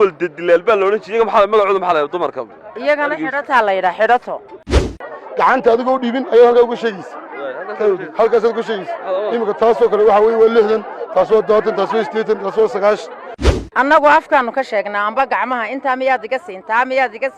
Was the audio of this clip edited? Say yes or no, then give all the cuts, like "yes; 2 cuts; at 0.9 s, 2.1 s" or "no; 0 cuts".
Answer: yes; 2 cuts; at 5.0 s, 13.4 s